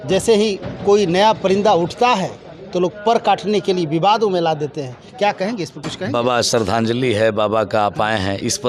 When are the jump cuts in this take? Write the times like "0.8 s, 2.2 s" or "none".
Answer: none